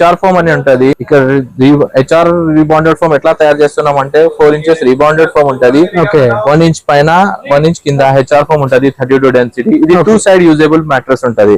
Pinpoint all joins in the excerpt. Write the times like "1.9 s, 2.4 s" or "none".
1.0 s